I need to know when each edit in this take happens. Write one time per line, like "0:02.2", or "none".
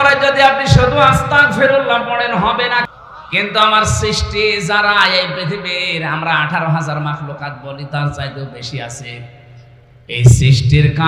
0:02.9